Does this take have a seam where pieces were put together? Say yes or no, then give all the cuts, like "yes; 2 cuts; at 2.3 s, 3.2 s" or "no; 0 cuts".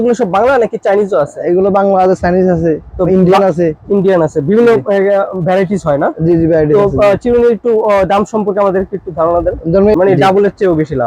yes; 1 cut; at 9.9 s